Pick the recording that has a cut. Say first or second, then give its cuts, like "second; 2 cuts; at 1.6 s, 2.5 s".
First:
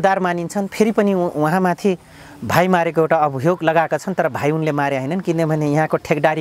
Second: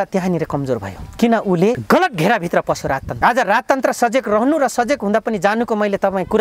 second; 2 cuts; at 1.8 s, 3.1 s